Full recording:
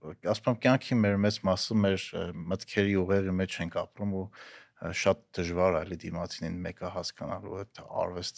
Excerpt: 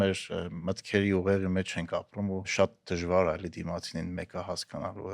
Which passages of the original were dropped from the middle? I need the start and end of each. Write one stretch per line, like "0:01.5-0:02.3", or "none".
0:04.3-0:04.9